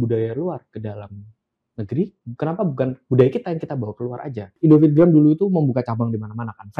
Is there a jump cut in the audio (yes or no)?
yes